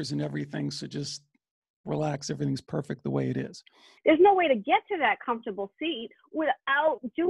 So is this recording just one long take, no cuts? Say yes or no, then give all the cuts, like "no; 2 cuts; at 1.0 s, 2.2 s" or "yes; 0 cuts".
no; 1 cut; at 3.9 s